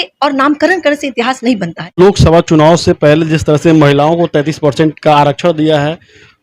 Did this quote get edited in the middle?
yes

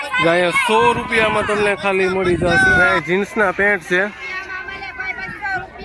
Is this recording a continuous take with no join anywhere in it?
no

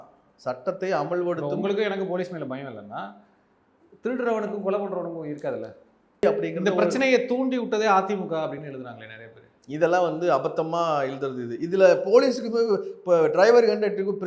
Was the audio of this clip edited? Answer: yes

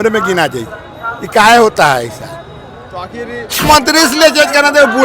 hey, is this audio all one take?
no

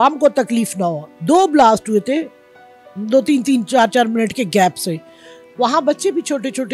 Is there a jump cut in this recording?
yes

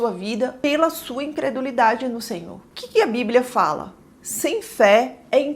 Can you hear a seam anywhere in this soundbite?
no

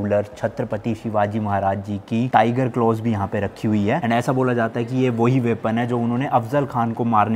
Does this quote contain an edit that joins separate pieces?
no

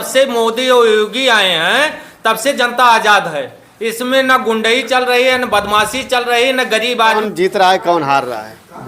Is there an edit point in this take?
yes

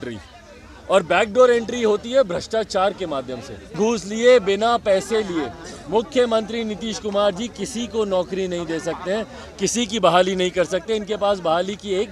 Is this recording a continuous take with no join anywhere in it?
no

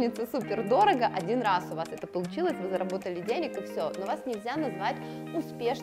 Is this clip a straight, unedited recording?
yes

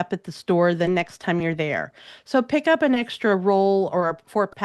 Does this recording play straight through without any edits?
yes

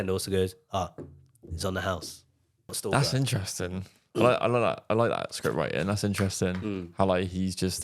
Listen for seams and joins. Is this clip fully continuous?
no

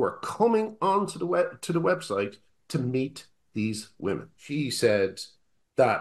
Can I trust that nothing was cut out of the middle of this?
no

